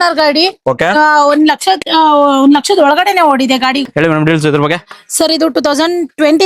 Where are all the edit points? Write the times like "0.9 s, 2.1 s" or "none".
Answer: 3.8 s